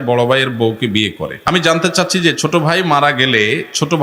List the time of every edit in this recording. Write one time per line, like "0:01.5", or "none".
0:01.3